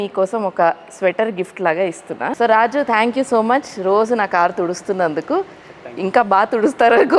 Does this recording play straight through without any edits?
no; 1 cut; at 2.3 s

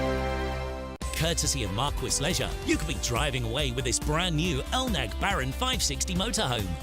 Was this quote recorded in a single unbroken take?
no; 1 cut; at 1.0 s

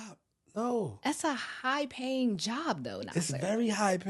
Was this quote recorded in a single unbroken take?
yes; 0 cuts

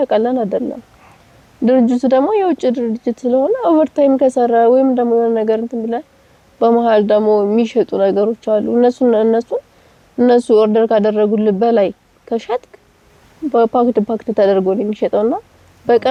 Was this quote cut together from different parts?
no; 0 cuts

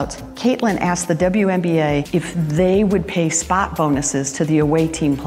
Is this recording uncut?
yes; 0 cuts

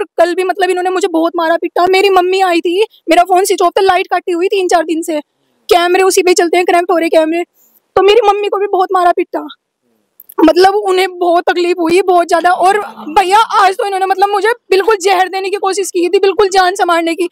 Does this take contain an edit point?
no; 0 cuts

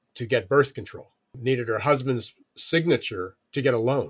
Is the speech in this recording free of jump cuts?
no; 1 cut; at 1.3 s

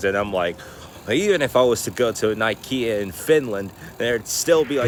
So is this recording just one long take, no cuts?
yes; 0 cuts

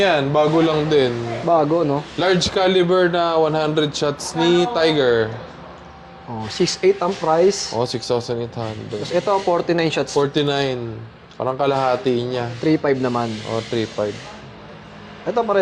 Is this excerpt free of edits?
yes; 0 cuts

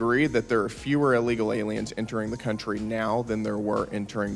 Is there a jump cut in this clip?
no; 0 cuts

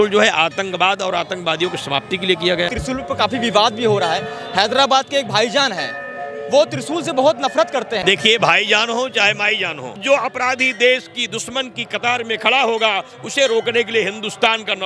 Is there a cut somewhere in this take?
yes; 3 cuts; at 2.7 s, 8.0 s, 10.0 s

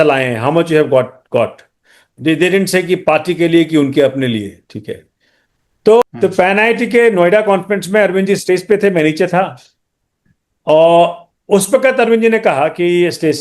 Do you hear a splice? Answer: yes; 1 cut; at 6.0 s

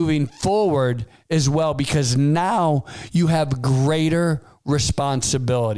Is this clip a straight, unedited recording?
yes; 0 cuts

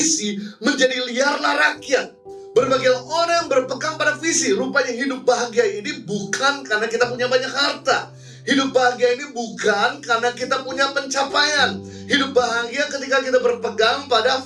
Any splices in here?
no; 0 cuts

